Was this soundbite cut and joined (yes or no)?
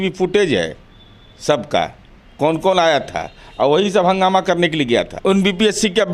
yes